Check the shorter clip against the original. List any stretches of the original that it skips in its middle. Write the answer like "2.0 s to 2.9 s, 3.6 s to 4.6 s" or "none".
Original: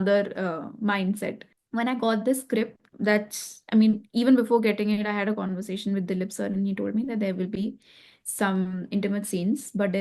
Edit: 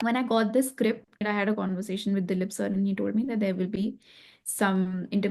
2.9 s to 5.0 s